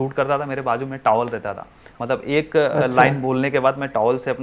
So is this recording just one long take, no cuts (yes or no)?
yes